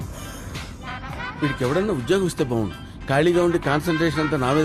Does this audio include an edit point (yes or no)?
no